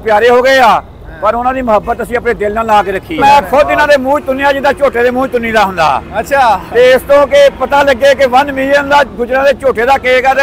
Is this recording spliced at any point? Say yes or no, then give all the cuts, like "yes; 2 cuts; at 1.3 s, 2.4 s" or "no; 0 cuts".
yes; 1 cut; at 3.2 s